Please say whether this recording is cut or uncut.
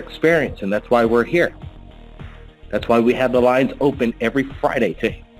uncut